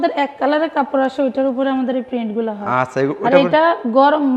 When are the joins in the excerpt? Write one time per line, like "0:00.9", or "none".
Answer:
none